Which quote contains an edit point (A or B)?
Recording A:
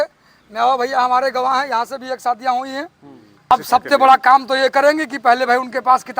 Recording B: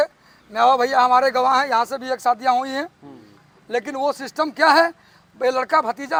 A